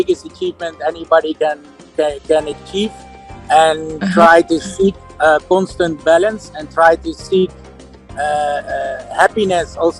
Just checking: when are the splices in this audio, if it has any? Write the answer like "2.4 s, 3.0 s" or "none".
none